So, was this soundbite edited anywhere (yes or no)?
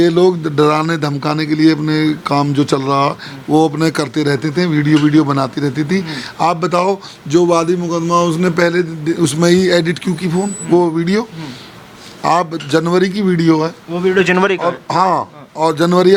no